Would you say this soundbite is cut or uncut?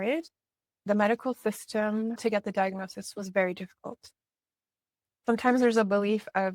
cut